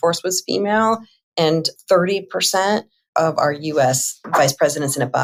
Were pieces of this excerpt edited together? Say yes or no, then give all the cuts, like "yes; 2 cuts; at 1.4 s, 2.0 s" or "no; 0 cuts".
no; 0 cuts